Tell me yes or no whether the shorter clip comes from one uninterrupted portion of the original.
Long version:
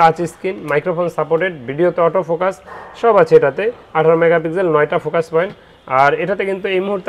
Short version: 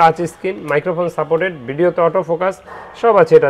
yes